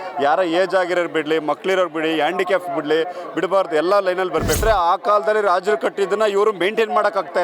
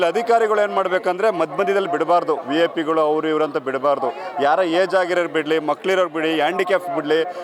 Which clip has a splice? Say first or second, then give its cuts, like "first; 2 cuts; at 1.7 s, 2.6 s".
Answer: first; 1 cut; at 4.6 s